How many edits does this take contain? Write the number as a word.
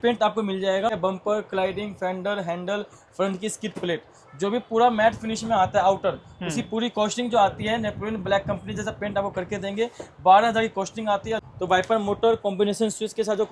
two